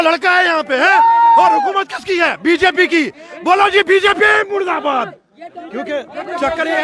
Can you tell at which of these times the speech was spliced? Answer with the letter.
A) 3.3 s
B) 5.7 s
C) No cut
C